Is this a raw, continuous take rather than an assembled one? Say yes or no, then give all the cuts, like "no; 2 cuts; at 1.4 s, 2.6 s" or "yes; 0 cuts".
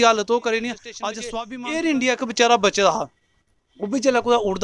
no; 1 cut; at 1.1 s